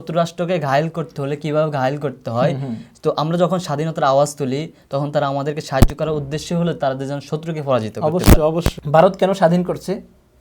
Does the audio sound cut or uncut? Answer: cut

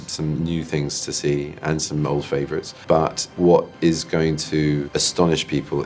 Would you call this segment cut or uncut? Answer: cut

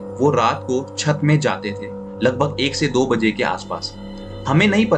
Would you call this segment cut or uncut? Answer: uncut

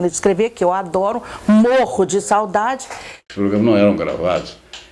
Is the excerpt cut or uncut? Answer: uncut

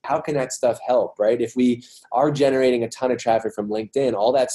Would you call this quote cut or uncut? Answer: uncut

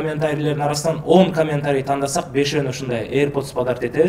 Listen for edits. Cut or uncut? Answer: uncut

